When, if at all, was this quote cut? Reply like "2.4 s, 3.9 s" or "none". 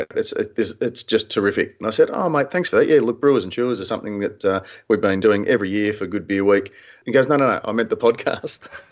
6.9 s